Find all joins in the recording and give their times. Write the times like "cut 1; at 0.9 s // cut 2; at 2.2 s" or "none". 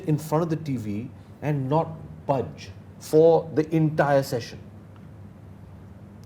none